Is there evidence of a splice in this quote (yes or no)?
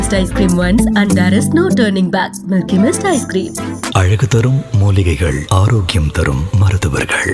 no